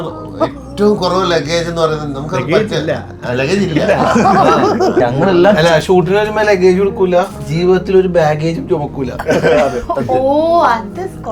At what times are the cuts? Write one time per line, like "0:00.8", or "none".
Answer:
0:05.0